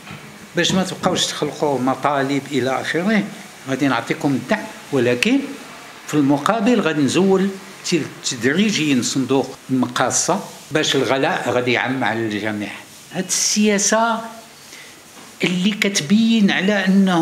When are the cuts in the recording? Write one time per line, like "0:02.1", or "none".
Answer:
0:09.6
0:10.6
0:13.1